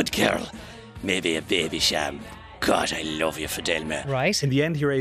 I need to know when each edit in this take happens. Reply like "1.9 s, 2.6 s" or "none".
4.0 s